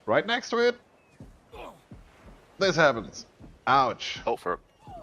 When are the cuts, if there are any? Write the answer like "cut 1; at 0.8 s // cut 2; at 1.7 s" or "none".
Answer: cut 1; at 4.1 s